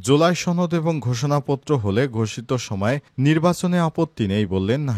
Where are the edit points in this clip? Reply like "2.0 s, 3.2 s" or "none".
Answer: none